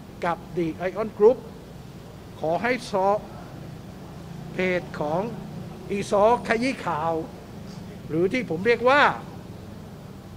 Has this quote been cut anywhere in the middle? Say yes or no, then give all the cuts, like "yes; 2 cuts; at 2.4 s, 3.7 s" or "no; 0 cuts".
no; 0 cuts